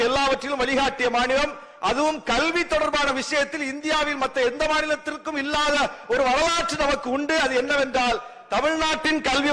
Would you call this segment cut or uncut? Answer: uncut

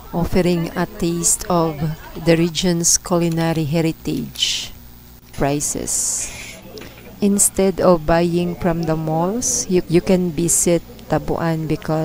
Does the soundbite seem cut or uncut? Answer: cut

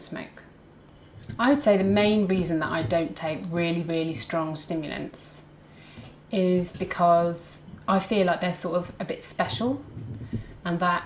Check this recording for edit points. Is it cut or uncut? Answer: uncut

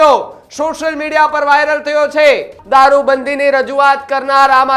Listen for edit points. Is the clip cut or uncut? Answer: cut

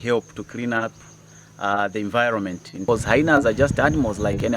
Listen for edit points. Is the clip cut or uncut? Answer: cut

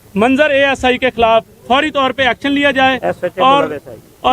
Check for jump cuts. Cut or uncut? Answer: uncut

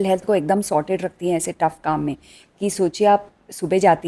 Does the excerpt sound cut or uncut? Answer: uncut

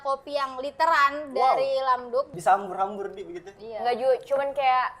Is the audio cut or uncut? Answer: cut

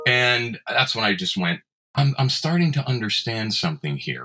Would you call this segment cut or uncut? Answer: cut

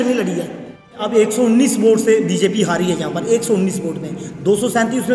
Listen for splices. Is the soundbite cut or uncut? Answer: cut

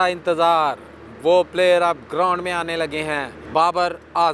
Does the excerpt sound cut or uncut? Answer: cut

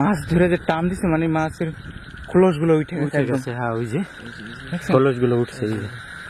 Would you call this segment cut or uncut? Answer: uncut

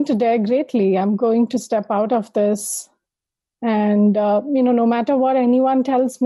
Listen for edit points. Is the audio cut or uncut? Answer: uncut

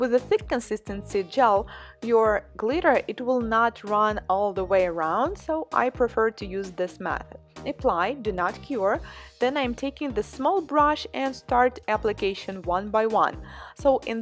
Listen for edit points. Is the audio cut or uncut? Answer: cut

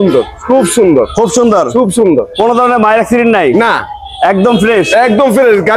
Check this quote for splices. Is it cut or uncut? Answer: uncut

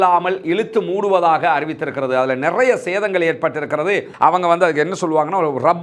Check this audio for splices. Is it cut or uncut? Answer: cut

